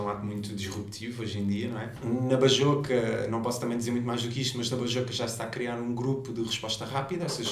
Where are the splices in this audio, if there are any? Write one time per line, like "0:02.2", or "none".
0:01.9